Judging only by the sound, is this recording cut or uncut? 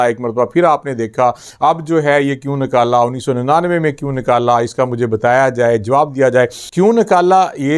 cut